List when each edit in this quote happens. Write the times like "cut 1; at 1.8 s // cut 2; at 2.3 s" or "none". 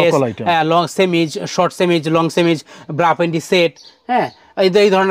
none